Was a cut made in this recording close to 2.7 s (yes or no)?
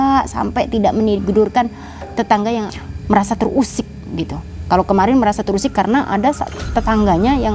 yes